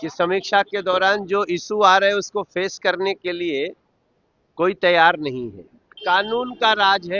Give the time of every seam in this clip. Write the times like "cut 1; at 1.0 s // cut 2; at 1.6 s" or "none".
cut 1; at 5.9 s

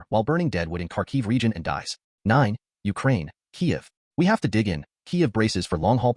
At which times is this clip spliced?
cut 1; at 2.0 s

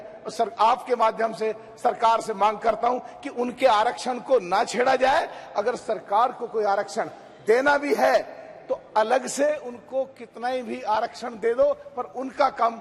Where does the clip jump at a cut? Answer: none

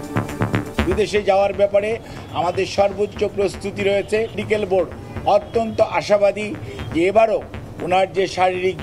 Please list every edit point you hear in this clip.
cut 1; at 0.8 s // cut 2; at 4.4 s

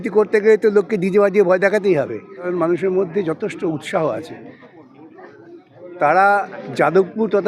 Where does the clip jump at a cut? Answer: cut 1; at 2.5 s

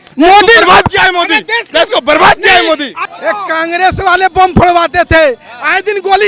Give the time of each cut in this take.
cut 1; at 3.0 s

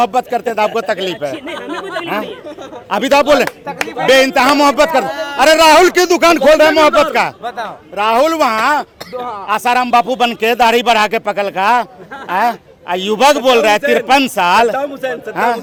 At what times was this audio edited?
none

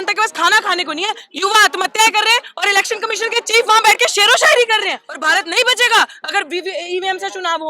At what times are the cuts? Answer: cut 1; at 5.1 s

